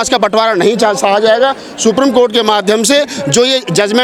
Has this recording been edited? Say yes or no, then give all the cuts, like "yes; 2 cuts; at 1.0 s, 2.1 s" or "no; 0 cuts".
no; 0 cuts